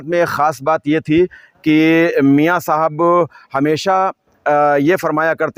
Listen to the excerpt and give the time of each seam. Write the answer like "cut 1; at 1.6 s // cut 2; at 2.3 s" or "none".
none